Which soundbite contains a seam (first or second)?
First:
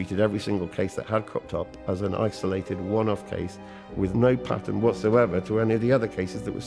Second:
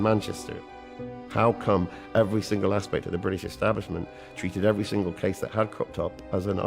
second